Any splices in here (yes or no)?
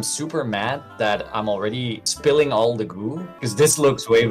yes